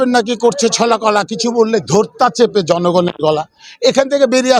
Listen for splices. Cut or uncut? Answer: uncut